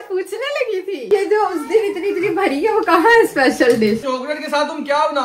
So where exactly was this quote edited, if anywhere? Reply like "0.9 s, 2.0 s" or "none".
1.0 s, 4.0 s